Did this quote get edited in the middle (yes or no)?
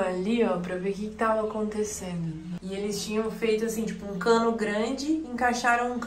yes